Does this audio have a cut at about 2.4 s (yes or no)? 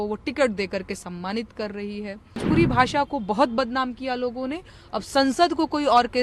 yes